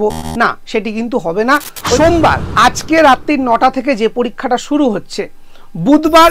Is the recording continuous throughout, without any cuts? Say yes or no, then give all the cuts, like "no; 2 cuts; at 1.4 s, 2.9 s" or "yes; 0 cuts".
no; 1 cut; at 2.0 s